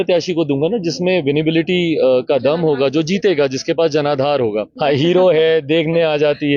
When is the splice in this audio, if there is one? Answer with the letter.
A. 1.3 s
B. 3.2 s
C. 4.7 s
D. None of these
C